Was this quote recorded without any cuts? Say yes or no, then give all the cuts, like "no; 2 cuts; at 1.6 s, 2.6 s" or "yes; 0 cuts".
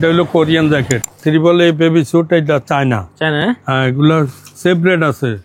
no; 1 cut; at 1.1 s